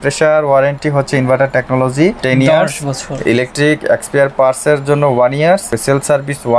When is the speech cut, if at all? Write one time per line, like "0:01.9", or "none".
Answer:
0:02.2
0:05.7